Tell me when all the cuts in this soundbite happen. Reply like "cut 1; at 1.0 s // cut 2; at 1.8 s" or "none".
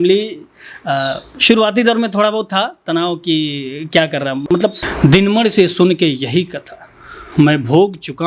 cut 1; at 4.9 s

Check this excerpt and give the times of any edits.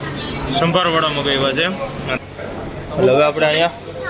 cut 1; at 2.1 s

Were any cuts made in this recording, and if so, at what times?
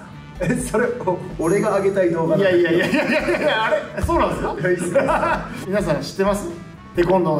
none

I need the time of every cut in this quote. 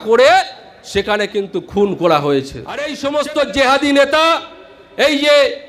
cut 1; at 2.9 s

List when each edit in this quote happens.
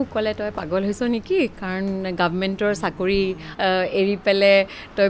cut 1; at 3.4 s

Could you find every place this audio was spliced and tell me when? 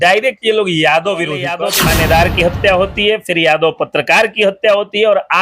cut 1; at 1.6 s

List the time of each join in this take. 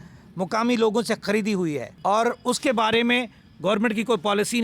cut 1; at 1.9 s

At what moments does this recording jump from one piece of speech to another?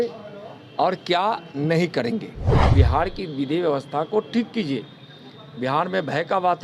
cut 1; at 2.6 s

